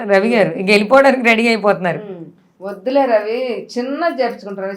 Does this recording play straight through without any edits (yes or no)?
yes